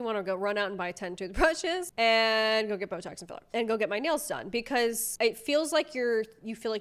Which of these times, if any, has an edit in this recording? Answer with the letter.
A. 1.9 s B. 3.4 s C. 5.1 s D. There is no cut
D